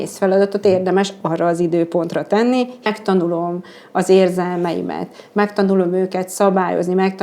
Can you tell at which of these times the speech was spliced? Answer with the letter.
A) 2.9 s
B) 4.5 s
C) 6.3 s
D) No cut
A